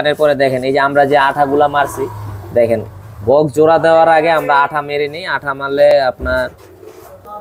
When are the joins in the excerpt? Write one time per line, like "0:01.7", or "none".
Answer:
none